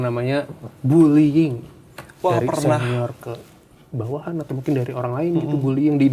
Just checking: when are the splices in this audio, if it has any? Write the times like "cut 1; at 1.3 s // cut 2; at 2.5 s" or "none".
none